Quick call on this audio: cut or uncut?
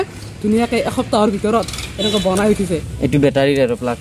uncut